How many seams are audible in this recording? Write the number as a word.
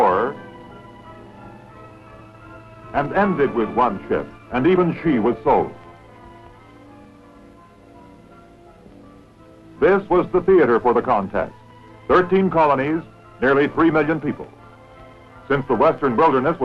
one